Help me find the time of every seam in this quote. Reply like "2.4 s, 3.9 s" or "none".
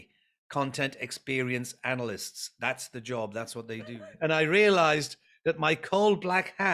4.0 s